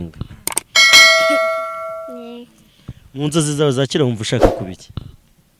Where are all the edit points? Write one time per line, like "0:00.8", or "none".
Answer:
0:00.9
0:02.1